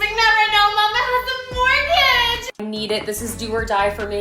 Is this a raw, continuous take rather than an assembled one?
no; 1 cut; at 2.6 s

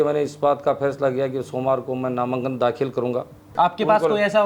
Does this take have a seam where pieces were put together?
yes; 1 cut; at 3.5 s

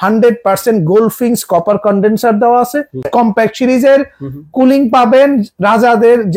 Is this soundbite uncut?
no; 1 cut; at 3.1 s

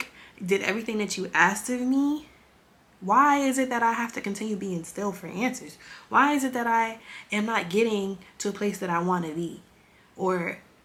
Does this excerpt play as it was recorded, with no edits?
yes; 0 cuts

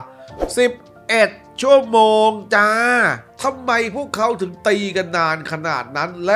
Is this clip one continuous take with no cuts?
no; 1 cut; at 3.3 s

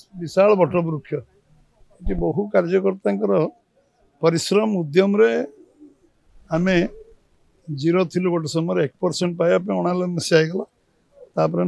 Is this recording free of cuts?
yes; 0 cuts

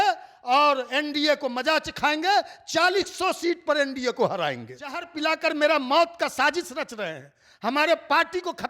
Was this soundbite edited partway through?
yes; 1 cut; at 5.1 s

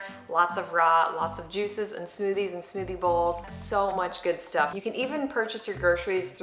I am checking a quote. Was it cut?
yes; 2 cuts; at 3.5 s, 4.8 s

